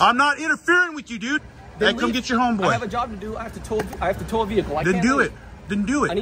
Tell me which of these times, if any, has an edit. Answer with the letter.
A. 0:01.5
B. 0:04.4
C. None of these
A